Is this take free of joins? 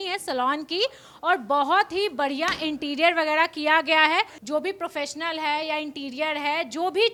yes; 0 cuts

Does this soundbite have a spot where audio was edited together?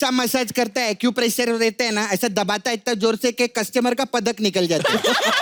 no; 0 cuts

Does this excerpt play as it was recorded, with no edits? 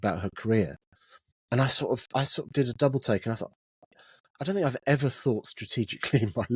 yes; 0 cuts

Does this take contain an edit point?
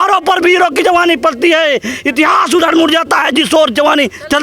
no; 0 cuts

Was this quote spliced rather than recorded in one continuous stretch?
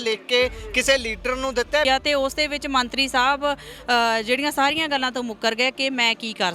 yes; 1 cut; at 1.8 s

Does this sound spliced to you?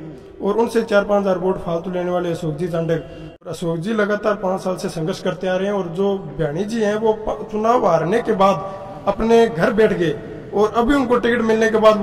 yes; 1 cut; at 3.5 s

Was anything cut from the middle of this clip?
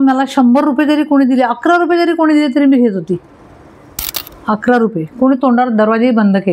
no; 0 cuts

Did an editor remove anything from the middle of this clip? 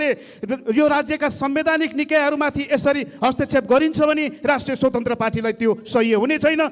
no; 0 cuts

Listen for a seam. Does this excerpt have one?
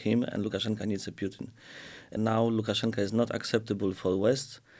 yes; 1 cut; at 2.2 s

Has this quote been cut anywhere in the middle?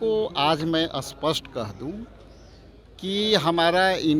no; 0 cuts

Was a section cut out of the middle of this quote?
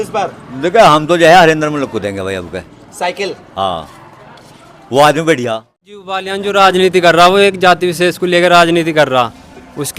yes; 1 cut; at 6.3 s

